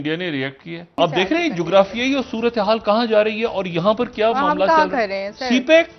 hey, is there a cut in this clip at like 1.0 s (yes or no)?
yes